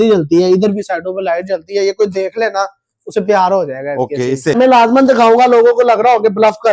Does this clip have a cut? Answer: yes; 1 cut; at 4.6 s

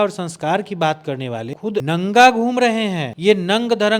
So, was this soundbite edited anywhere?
yes; 2 cuts; at 1.8 s, 3.1 s

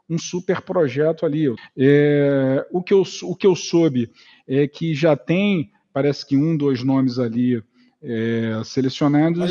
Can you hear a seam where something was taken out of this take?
yes; 1 cut; at 1.6 s

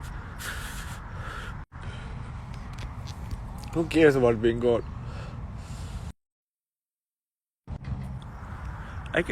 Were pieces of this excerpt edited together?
yes; 1 cut; at 8.3 s

